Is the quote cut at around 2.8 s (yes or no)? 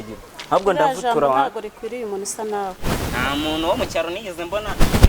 yes